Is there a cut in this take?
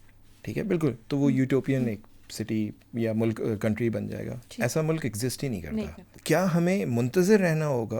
yes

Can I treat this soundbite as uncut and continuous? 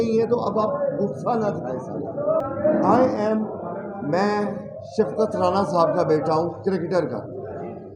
yes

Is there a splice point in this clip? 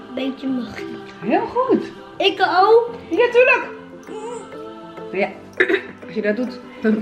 no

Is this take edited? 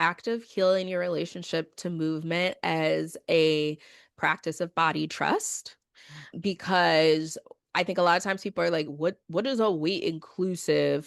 yes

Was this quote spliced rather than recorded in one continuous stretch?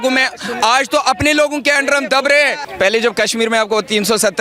yes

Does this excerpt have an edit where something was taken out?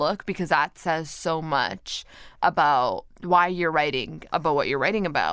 yes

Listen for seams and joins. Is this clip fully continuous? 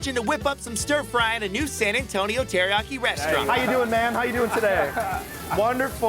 no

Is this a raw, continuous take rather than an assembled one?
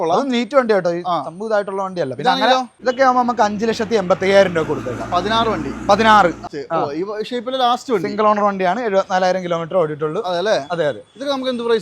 no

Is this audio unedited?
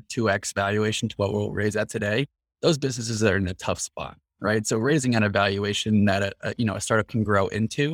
yes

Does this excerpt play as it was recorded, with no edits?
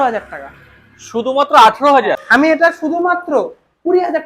no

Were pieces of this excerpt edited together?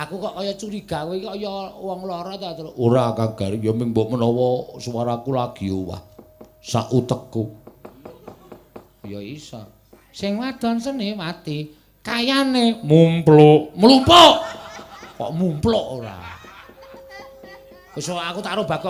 no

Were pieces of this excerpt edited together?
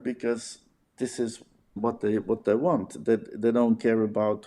yes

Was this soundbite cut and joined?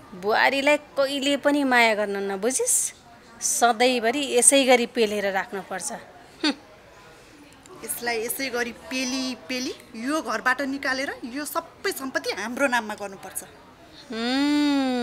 no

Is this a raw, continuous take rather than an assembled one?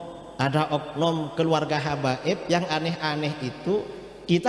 yes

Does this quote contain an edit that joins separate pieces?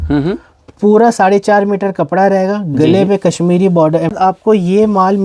yes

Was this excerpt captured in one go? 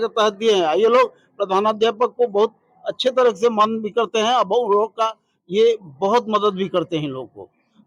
yes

